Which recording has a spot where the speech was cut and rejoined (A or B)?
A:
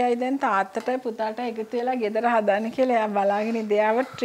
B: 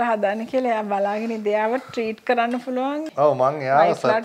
B